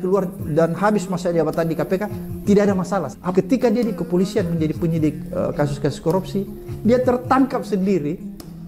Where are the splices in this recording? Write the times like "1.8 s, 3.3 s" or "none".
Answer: 3.2 s

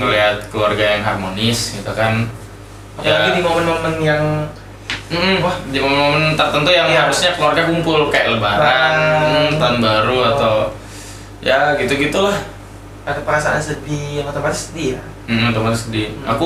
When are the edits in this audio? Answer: none

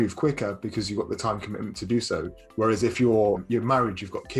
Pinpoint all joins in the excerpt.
3.4 s

